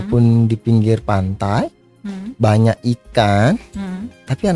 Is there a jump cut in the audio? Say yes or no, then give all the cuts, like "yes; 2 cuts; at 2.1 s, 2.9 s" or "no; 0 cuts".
no; 0 cuts